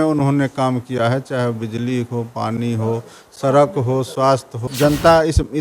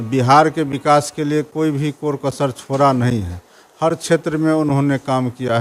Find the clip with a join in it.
first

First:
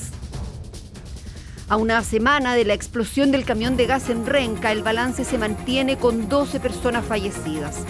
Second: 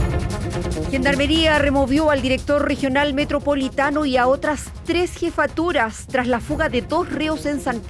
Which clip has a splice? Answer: second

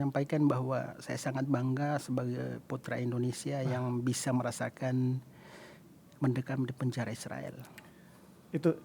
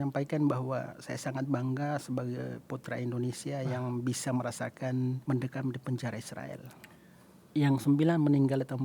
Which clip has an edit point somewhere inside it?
second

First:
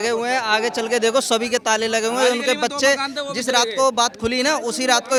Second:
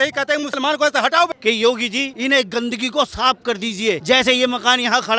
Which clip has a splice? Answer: second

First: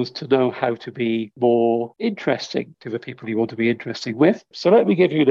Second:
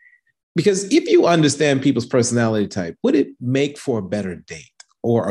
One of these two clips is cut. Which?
first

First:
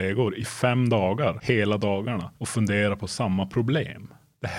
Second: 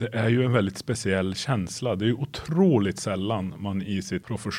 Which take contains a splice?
first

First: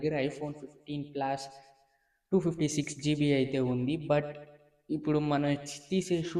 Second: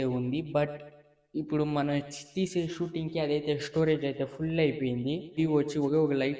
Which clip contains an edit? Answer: second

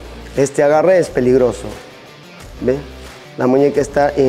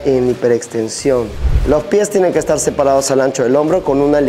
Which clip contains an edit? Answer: second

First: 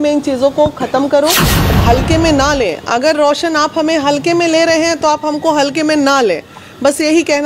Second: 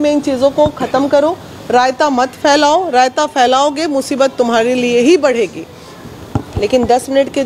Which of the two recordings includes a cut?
first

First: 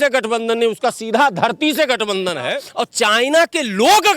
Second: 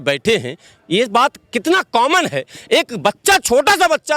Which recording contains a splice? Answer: first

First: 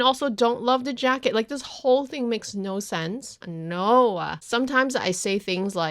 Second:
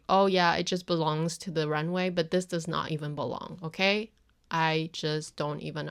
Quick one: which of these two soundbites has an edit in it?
first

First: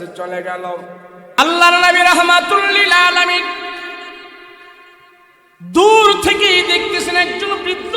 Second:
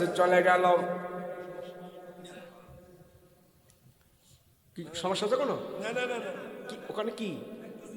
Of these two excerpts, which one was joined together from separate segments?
first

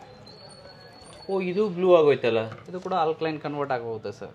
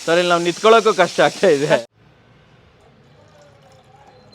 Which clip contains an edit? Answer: second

